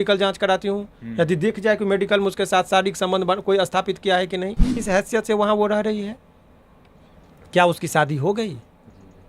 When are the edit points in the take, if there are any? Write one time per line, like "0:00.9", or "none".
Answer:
0:04.7